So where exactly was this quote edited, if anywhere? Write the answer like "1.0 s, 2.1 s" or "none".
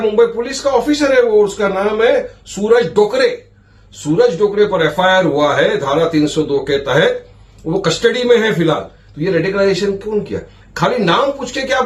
none